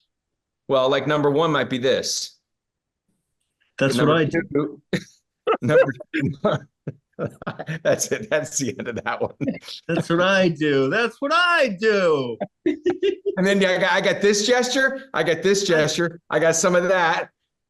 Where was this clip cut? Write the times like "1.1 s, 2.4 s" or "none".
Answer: none